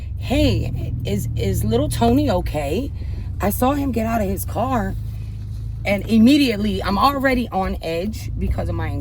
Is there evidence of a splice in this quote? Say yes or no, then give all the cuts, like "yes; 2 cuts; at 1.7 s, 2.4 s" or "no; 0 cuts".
no; 0 cuts